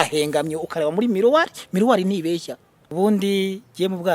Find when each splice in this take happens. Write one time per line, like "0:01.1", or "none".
0:02.9